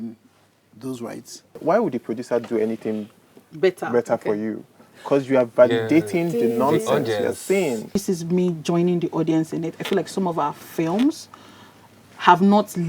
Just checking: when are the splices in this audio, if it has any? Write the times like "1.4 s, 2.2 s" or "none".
1.5 s, 7.9 s